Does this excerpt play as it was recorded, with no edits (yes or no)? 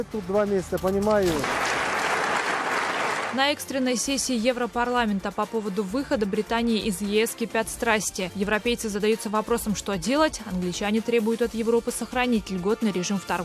no